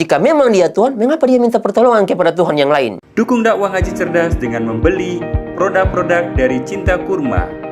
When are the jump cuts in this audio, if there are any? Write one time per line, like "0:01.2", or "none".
none